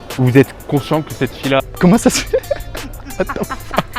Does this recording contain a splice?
yes; 1 cut; at 1.6 s

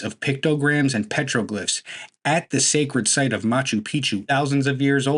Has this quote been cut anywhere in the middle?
yes; 1 cut; at 4.2 s

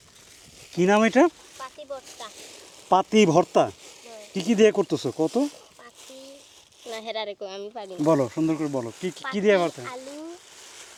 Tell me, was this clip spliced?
no; 0 cuts

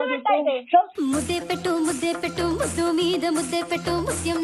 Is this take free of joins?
no; 1 cut; at 0.9 s

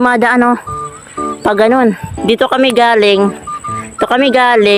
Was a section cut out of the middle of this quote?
no; 0 cuts

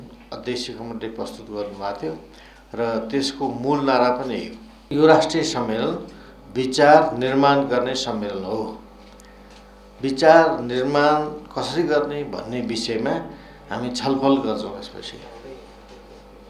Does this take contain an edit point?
yes; 1 cut; at 4.9 s

